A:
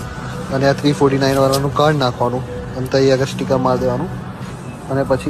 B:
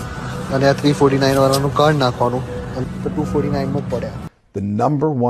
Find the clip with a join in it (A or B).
B